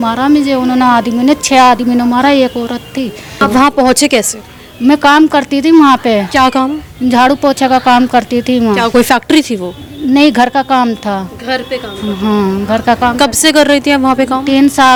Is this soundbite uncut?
yes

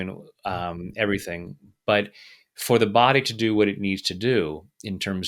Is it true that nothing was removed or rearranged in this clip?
yes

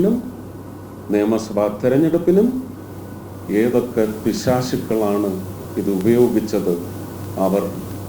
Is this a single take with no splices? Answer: yes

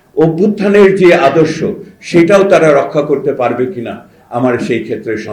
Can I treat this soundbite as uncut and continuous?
yes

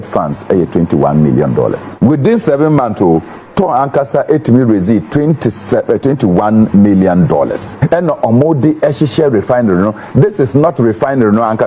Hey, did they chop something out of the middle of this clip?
yes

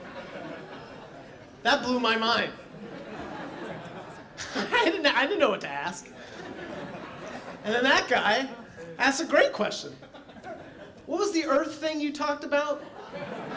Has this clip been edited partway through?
yes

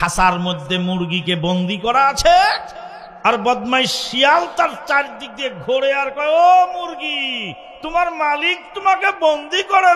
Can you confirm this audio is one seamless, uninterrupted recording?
yes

